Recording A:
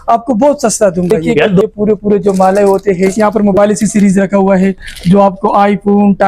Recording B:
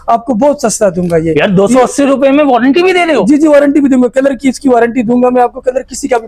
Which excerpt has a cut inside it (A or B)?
A